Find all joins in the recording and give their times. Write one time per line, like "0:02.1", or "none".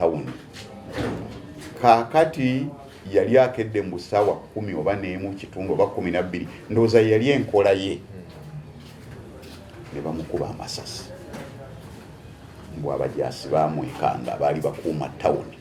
none